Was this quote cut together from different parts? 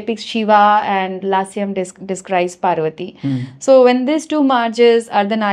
no; 0 cuts

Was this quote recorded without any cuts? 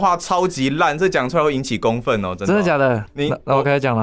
no; 1 cut; at 3.0 s

